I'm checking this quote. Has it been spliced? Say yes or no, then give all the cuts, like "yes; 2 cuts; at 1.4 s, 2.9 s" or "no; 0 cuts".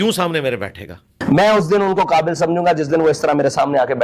yes; 1 cut; at 1.2 s